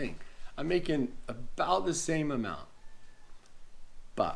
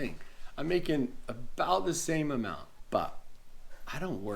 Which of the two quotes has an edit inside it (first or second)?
second